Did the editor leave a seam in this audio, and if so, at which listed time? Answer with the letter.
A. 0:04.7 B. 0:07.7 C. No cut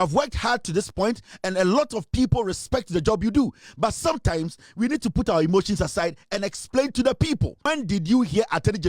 B